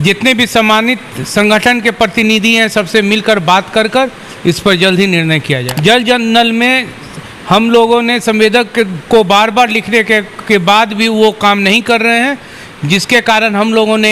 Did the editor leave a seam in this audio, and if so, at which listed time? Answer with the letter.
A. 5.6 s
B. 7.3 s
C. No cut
A